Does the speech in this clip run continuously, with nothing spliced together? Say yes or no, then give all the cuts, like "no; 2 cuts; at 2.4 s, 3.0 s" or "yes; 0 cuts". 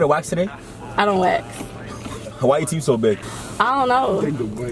no; 2 cuts; at 2.2 s, 3.4 s